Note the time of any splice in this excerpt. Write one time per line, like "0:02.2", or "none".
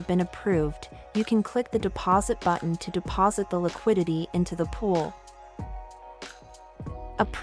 0:05.1
0:06.6